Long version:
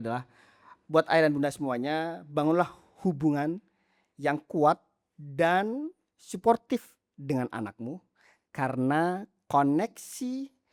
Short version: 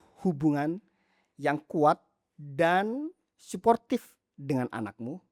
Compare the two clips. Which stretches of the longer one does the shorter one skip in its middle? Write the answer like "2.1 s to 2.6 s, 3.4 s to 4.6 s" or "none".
none